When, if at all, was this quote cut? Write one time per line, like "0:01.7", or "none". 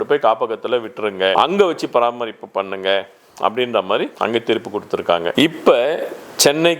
none

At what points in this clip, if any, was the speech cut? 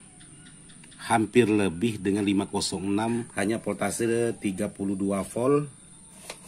0:03.3

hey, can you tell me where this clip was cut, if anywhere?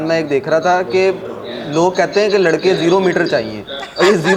none

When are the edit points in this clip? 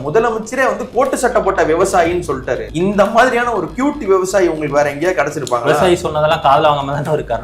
0:02.7

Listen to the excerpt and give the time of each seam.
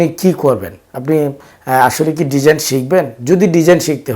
none

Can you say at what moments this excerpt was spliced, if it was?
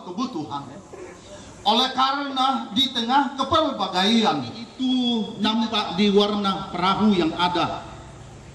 0:04.6

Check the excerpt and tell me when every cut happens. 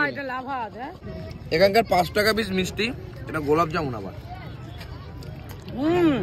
0:01.0

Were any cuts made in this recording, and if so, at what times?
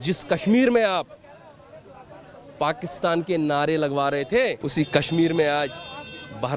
0:04.6

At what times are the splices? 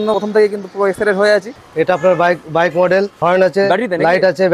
0:01.5
0:03.1

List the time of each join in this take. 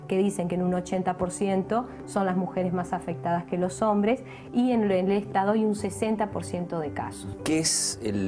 none

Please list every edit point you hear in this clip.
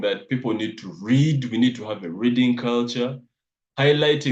none

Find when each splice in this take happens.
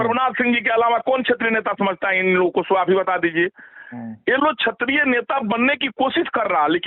none

